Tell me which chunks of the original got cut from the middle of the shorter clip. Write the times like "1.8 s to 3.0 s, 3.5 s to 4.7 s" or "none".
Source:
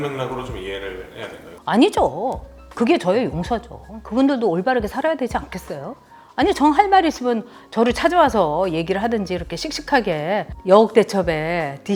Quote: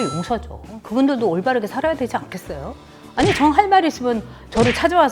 none